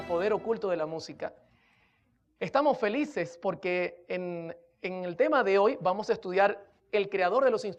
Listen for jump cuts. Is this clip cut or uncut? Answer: uncut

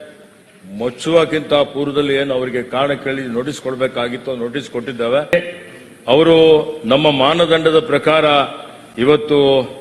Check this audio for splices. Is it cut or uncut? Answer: cut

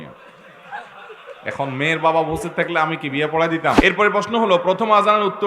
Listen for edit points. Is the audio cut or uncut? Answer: cut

